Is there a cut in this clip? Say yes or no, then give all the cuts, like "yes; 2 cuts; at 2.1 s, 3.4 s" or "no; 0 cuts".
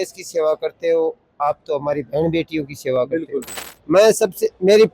yes; 1 cut; at 3.6 s